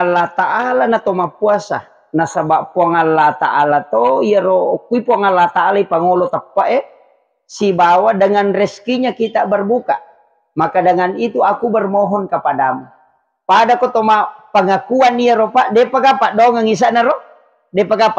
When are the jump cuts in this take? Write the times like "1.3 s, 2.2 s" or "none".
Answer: none